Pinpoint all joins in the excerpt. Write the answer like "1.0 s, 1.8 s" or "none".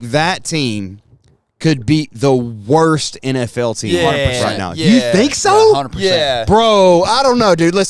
none

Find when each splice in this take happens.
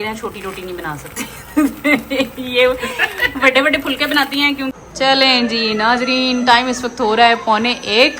4.8 s

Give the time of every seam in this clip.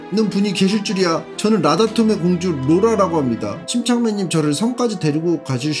1.3 s, 3.6 s

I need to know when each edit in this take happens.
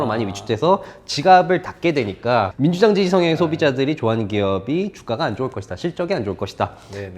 2.5 s

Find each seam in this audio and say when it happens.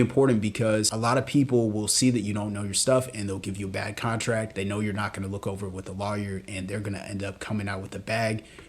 0.9 s, 4.5 s

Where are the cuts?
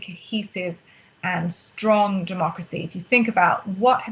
none

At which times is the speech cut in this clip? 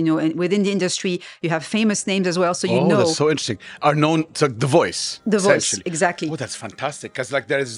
none

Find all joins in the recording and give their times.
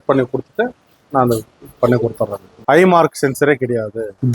2.6 s

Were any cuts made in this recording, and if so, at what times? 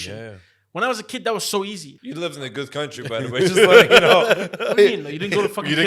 1.9 s

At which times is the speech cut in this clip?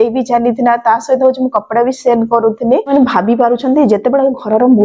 2.9 s

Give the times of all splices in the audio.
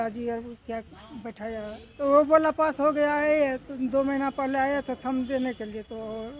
1.8 s

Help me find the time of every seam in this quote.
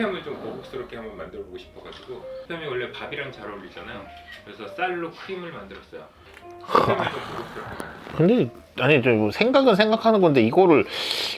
none

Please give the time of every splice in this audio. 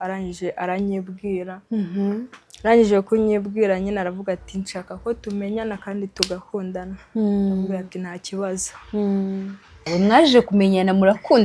9.9 s

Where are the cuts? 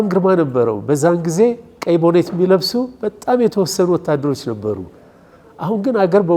none

